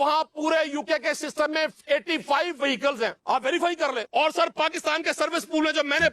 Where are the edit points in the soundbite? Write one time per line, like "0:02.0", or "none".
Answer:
0:03.2
0:04.0